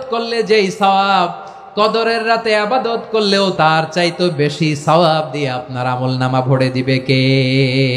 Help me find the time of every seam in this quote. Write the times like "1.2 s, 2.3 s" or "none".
3.5 s